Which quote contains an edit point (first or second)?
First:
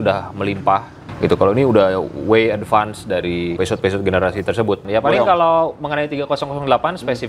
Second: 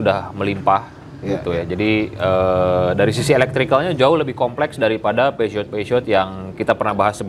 first